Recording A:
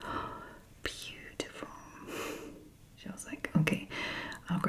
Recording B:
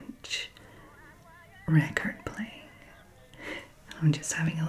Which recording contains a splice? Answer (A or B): A